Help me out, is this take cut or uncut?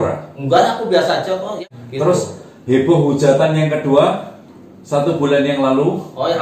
cut